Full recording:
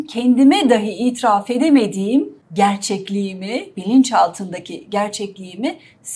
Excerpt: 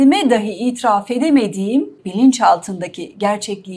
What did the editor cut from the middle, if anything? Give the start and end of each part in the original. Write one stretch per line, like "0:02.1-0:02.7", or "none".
0:02.4-0:03.7